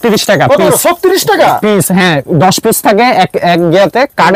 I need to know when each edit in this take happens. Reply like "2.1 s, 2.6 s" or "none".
none